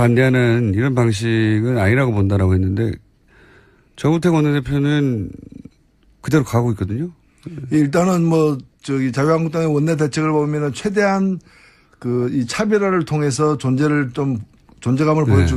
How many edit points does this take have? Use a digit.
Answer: 1